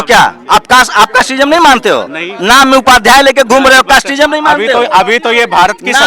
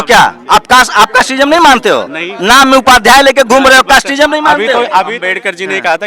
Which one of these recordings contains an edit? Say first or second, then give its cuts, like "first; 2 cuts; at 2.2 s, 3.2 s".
second; 1 cut; at 5.1 s